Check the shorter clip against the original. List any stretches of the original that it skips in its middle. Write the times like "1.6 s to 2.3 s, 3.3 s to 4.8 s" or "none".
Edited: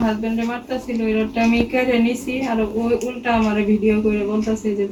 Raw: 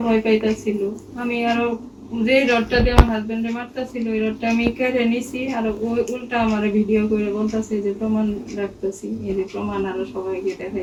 none